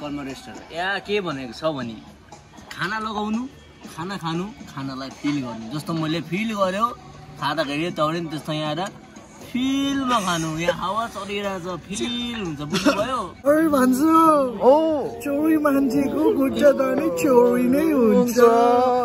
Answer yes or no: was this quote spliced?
yes